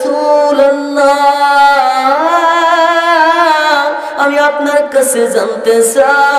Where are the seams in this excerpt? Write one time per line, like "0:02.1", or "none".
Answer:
0:01.0